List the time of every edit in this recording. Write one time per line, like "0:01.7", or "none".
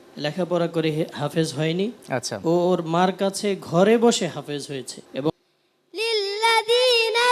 0:05.3